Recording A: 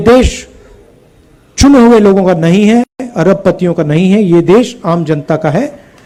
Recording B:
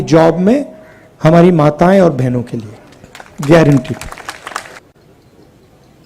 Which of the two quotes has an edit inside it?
B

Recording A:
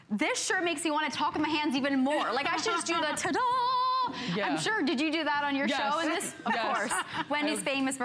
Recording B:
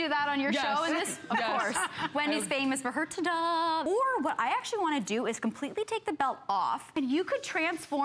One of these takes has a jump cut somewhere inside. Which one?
B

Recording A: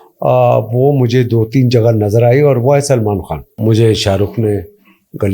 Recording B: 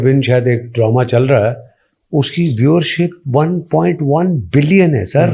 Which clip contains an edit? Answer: A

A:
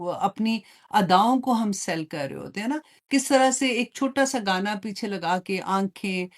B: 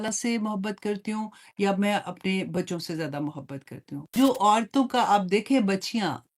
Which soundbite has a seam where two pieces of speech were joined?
B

